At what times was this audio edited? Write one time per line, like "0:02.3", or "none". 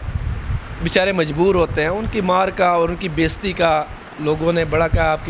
none

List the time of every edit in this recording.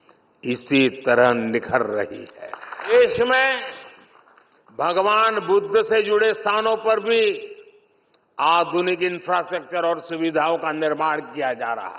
0:02.9

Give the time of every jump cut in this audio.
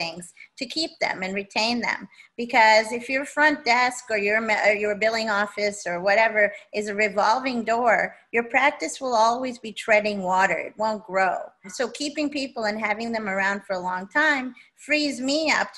0:11.7

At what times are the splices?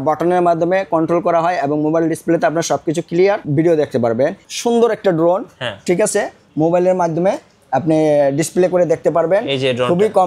0:03.4
0:04.4

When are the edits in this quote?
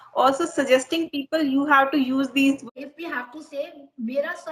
0:02.7

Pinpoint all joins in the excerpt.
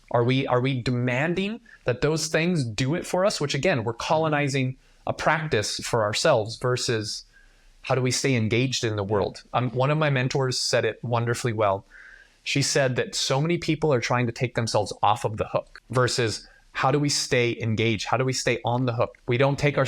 0:15.8

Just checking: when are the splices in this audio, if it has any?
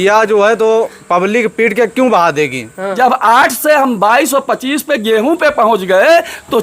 0:02.8

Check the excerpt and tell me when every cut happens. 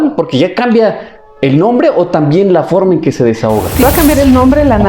0:03.8

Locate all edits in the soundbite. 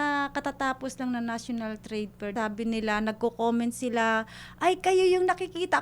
0:02.3

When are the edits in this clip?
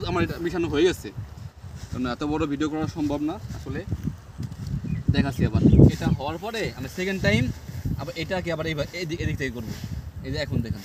none

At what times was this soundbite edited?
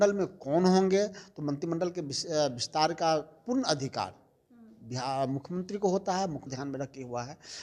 0:06.4

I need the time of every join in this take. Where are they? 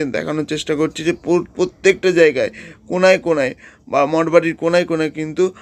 none

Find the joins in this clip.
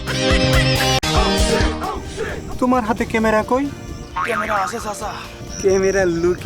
0:01.0

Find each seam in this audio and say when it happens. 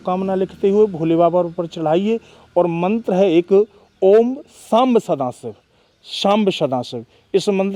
none

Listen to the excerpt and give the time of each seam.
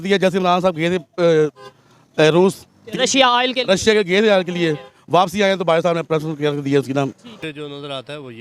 0:07.3

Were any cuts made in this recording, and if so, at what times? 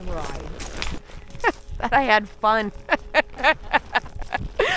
none

